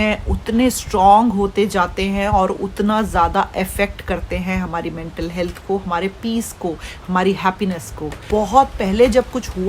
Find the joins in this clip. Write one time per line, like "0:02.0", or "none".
0:08.2